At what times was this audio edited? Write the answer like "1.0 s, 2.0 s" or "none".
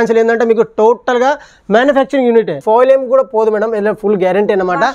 2.6 s